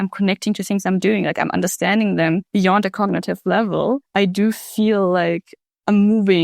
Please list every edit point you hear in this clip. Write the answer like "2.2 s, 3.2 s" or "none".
2.5 s, 4.1 s